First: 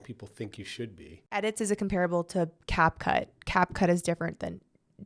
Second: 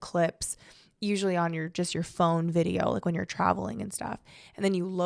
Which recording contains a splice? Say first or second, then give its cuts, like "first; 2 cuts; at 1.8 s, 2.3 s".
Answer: first; 1 cut; at 1.4 s